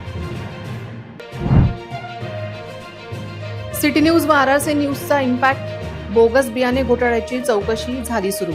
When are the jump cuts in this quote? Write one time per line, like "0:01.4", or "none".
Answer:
0:00.9